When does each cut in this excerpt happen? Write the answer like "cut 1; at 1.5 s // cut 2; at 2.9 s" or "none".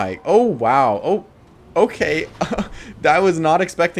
none